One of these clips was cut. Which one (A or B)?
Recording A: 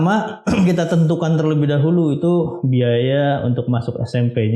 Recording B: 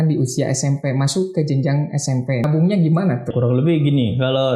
B